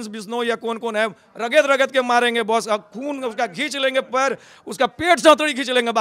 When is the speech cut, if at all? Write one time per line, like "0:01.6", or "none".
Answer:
none